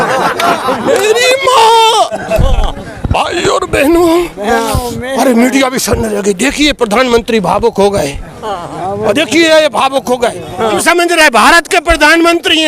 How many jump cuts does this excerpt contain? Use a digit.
1